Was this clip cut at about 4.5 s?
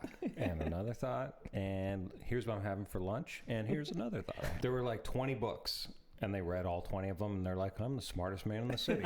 yes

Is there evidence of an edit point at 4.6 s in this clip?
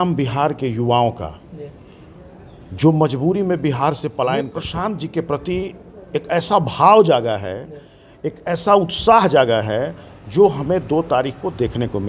yes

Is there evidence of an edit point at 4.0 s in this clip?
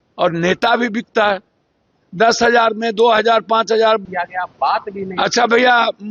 yes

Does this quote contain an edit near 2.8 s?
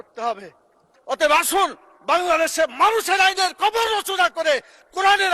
no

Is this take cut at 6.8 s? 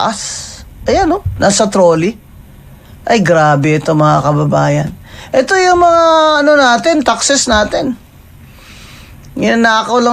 no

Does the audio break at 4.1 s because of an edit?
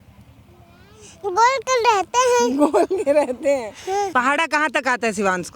yes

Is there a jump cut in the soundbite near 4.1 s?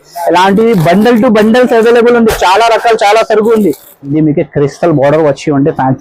yes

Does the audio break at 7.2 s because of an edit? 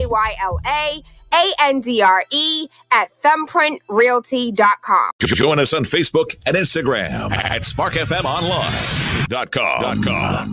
no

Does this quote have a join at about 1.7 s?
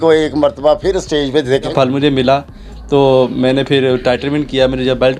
yes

